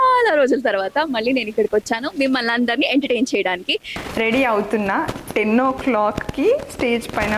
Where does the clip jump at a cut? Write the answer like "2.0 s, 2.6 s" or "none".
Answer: 3.9 s